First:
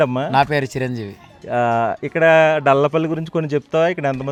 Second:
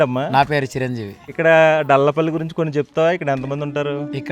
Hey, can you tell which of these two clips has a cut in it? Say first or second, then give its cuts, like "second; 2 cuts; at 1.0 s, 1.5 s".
second; 1 cut; at 1.3 s